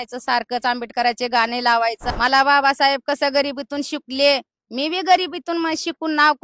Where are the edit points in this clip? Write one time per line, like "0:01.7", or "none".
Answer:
0:02.0